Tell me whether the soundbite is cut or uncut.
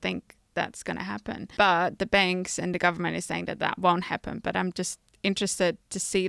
cut